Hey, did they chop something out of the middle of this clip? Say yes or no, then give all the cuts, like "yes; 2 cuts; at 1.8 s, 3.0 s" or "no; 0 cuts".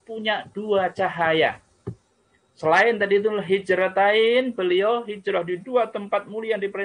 no; 0 cuts